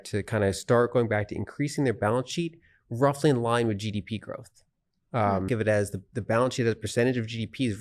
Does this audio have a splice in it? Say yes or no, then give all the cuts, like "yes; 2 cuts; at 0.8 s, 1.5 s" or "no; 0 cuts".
yes; 1 cut; at 5.5 s